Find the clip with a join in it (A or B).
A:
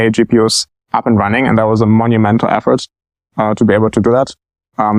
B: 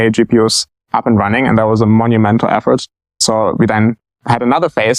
B